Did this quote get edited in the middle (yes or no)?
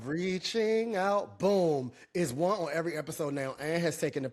no